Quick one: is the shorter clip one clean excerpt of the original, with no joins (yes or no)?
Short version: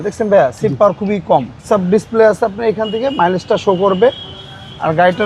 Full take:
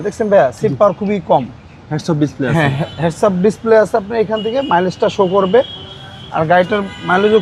no